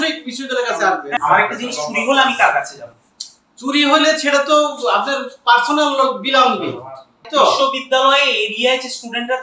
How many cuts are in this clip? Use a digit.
2